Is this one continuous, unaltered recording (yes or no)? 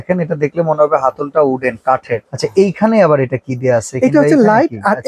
yes